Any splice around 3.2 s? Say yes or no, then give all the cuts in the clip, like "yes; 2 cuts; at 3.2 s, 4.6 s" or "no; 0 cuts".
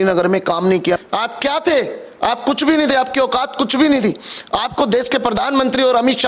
no; 1 cut; at 1.0 s